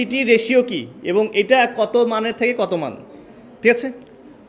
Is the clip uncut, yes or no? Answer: yes